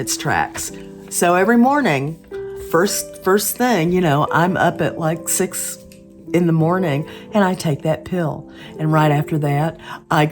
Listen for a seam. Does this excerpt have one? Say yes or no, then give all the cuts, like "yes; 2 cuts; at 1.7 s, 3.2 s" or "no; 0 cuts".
no; 0 cuts